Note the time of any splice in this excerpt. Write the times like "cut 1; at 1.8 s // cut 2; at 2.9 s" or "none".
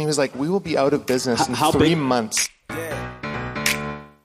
cut 1; at 2.4 s